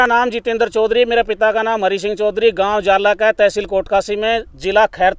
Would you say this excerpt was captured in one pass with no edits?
yes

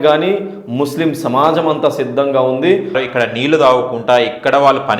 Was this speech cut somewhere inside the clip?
yes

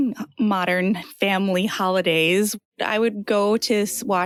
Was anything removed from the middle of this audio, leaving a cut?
no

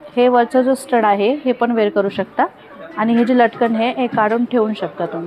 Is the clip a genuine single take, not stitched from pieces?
yes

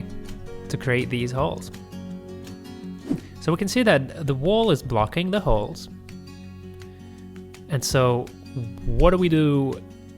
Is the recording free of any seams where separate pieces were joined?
no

